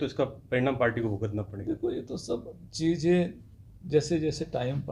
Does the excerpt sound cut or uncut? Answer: uncut